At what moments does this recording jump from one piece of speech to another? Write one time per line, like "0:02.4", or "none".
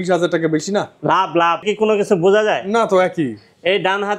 0:01.7